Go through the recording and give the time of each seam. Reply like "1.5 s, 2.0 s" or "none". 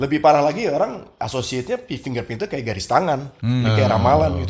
3.3 s